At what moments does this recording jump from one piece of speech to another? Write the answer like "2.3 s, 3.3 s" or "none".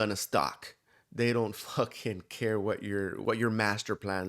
3.2 s